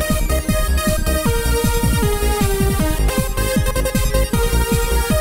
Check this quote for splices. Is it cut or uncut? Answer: cut